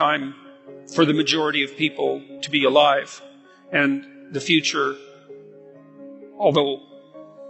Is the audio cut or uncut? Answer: uncut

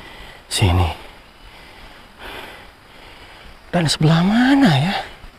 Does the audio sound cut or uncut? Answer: uncut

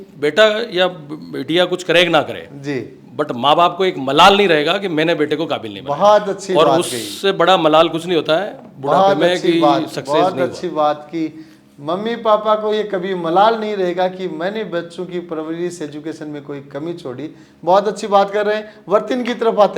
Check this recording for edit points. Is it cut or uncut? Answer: uncut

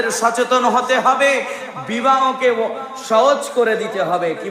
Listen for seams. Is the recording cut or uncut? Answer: uncut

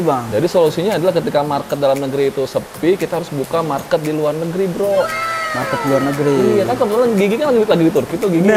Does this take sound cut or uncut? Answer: uncut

